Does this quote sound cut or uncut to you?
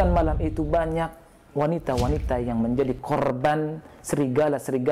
uncut